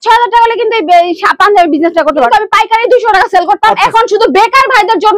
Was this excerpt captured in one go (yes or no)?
no